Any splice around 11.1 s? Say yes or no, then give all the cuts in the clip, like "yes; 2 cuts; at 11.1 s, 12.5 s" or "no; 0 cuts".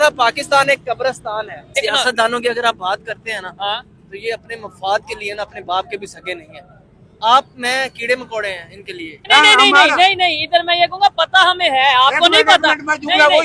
no; 2 cuts; at 1.7 s, 9.1 s